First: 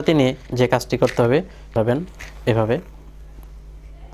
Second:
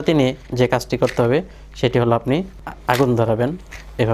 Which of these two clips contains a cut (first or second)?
first